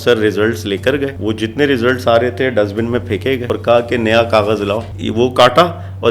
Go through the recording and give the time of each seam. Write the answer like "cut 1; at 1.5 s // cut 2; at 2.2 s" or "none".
cut 1; at 1.2 s // cut 2; at 3.4 s // cut 3; at 4.9 s